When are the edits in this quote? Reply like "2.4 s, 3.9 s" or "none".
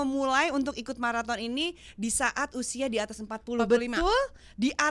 none